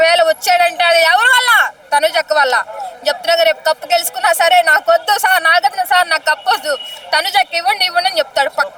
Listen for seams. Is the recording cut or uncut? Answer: uncut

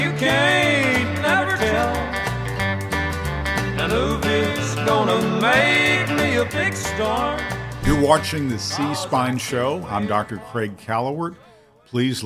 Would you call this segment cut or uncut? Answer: cut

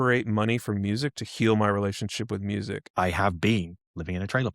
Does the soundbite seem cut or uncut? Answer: cut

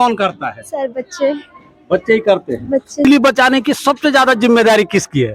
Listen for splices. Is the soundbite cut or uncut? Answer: cut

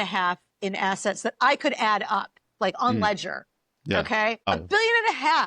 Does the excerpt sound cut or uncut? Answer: cut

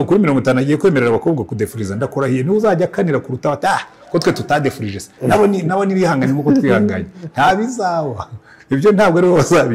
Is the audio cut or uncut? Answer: uncut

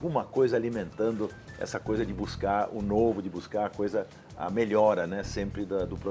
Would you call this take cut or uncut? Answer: uncut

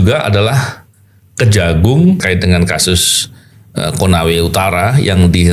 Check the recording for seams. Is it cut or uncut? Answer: cut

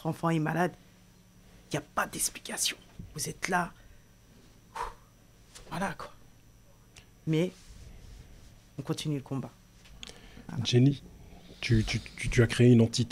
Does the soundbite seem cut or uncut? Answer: uncut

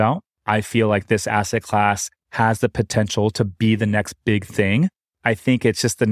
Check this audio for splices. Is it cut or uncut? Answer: cut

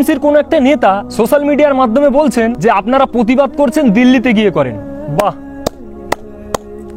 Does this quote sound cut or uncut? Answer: cut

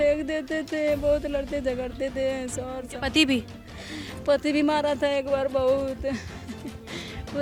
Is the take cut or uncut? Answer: uncut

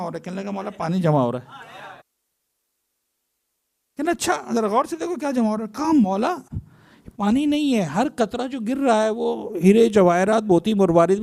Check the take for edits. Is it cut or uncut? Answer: uncut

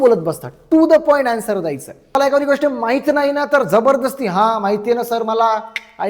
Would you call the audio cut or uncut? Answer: cut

